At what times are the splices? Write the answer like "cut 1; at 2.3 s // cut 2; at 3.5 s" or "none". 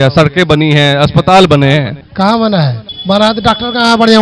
cut 1; at 2.0 s // cut 2; at 2.9 s